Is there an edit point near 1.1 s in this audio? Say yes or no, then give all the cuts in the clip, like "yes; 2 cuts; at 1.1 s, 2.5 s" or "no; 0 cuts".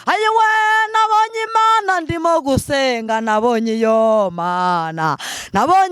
no; 0 cuts